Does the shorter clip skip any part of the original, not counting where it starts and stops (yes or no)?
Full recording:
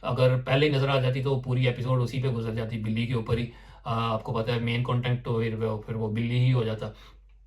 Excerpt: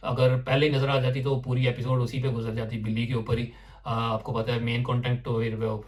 no